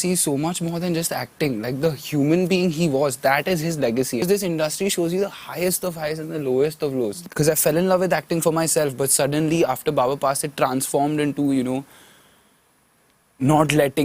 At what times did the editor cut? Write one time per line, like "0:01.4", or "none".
0:04.2
0:07.2